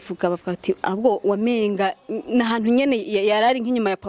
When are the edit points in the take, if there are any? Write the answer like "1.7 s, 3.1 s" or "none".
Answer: none

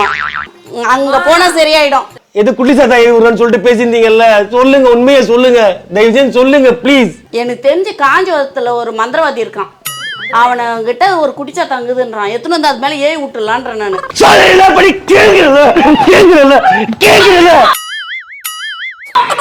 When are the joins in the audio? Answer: 14.0 s

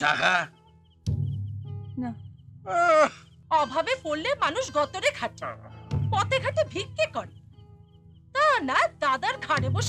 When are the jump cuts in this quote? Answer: 3.3 s

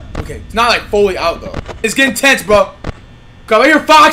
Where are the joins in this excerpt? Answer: 1.8 s

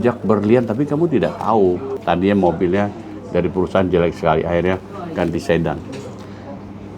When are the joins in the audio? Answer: 1.9 s

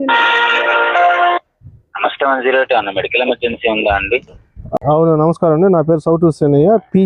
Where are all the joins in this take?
4.7 s

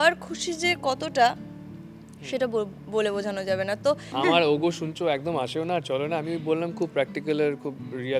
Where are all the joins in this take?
4.1 s

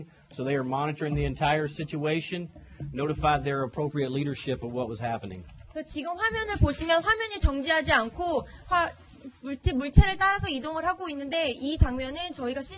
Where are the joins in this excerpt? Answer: 1.8 s

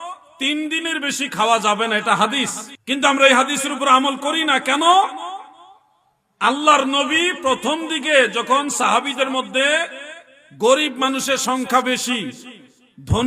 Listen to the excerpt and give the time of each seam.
none

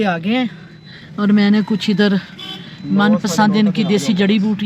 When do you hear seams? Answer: none

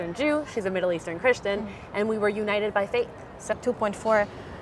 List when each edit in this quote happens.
3.5 s

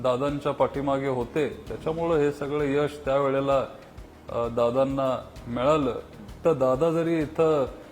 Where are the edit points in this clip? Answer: 6.4 s

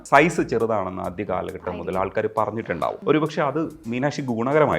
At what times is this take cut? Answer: 3.0 s

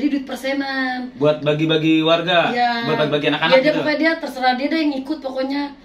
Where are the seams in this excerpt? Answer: none

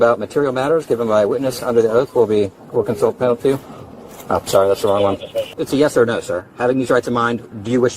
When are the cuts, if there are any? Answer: 5.5 s

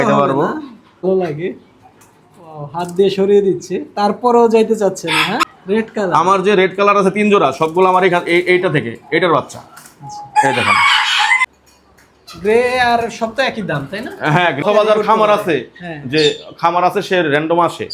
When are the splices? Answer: 1.0 s, 5.5 s, 11.4 s, 14.6 s

